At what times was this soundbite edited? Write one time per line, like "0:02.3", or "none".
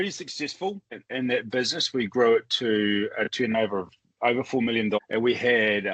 0:00.9
0:05.0